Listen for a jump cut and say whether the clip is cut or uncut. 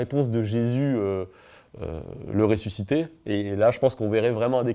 uncut